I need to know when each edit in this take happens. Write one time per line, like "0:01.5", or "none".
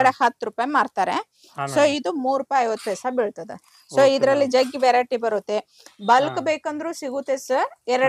none